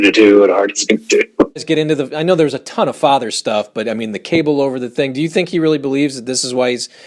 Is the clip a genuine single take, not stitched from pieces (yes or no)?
no